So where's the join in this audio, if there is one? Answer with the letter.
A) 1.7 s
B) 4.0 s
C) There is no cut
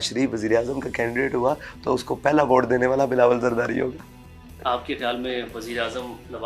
C